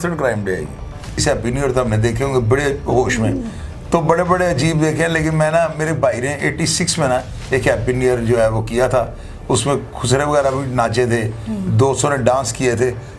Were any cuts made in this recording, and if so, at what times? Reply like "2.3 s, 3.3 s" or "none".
1.2 s